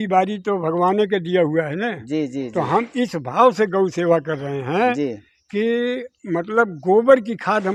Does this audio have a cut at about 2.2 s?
no; 0 cuts

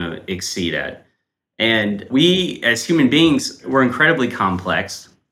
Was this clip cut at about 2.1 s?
yes; 2 cuts; at 2.1 s, 3.6 s

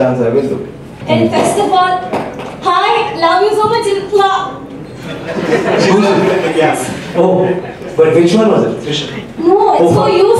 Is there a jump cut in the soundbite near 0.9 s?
yes; 1 cut; at 0.9 s

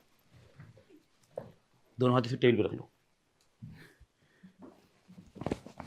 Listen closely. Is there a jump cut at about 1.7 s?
no; 0 cuts

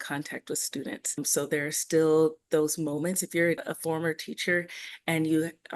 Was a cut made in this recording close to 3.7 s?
yes; 2 cuts; at 1.2 s, 3.7 s

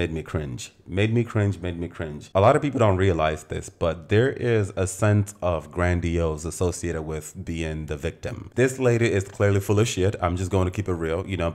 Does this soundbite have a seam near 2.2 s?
yes; 2 cuts; at 2.2 s, 8.4 s

